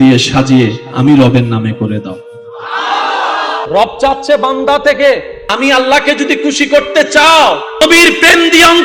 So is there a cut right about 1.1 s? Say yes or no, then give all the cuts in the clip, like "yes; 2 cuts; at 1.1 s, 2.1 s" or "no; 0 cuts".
no; 3 cuts; at 3.7 s, 5.4 s, 7.8 s